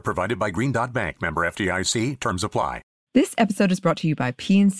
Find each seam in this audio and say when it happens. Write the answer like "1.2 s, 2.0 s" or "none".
2.9 s

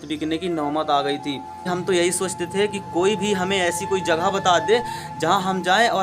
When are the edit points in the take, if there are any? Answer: 1.6 s

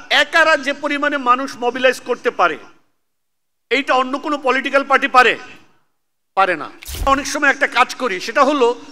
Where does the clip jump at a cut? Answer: 7.1 s

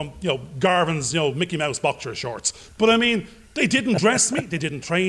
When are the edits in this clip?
none

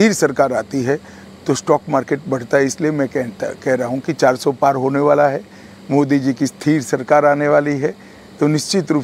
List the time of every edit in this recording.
none

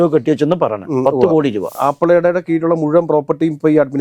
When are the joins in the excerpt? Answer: 1.7 s

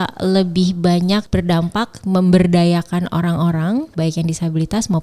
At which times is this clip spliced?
1.3 s, 3.9 s

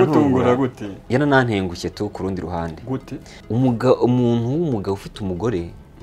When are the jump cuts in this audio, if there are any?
0.9 s, 3.3 s

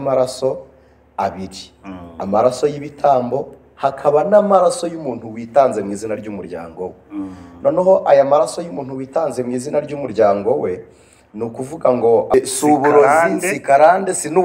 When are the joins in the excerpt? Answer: 12.3 s

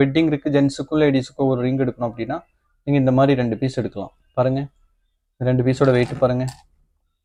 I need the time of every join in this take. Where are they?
none

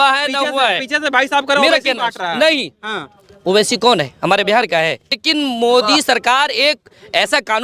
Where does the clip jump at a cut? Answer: 5.2 s

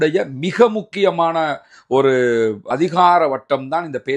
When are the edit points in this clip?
2.7 s

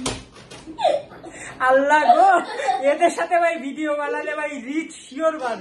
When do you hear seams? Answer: none

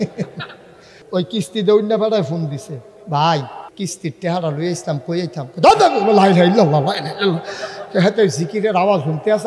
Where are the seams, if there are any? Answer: 1.0 s, 3.7 s

